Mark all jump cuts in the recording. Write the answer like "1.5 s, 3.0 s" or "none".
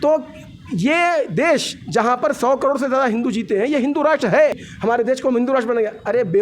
4.6 s

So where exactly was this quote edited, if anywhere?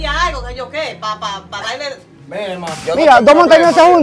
2.8 s

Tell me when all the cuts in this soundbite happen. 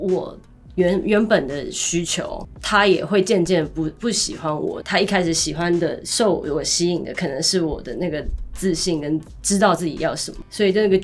2.5 s, 4.8 s

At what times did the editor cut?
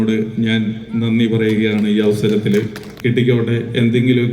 2.9 s

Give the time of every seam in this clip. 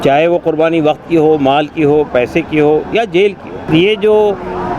3.6 s

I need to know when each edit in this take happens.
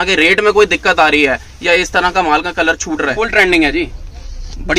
3.1 s

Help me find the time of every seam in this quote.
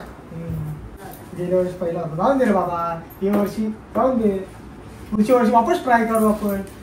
1.0 s

